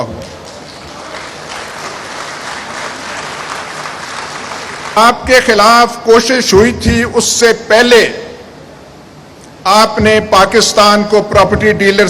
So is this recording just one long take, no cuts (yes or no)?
no